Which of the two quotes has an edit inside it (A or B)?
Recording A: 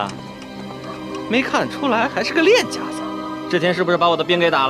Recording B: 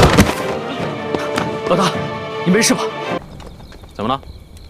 B